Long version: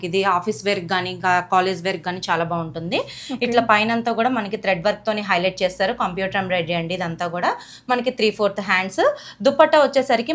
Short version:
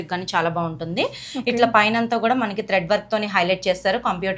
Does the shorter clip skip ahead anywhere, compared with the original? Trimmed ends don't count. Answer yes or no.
no